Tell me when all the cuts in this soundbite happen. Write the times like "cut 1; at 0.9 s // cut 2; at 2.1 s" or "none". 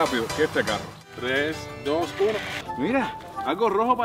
cut 1; at 2.6 s